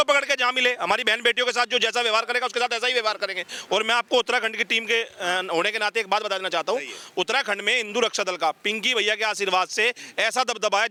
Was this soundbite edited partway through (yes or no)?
no